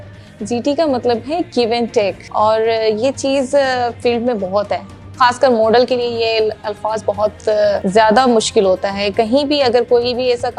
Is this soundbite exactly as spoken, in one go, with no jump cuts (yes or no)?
no